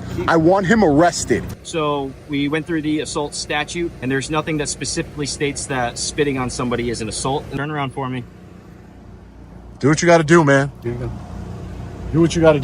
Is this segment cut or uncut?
cut